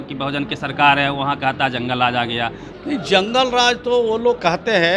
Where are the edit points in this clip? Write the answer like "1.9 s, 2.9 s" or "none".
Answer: 2.7 s